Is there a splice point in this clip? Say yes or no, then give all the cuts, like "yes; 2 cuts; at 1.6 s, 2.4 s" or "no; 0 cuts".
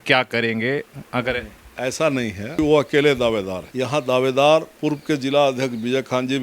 no; 0 cuts